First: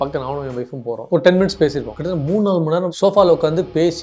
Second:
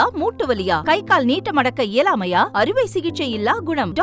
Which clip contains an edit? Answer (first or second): first